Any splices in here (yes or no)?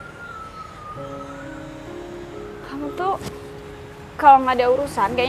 no